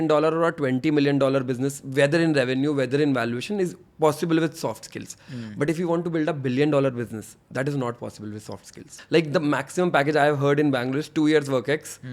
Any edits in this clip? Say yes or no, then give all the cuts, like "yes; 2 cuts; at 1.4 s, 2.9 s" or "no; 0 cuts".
yes; 1 cut; at 8.9 s